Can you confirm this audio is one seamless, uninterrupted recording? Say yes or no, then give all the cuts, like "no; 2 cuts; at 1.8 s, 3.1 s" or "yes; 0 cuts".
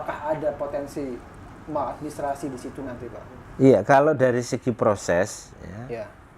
yes; 0 cuts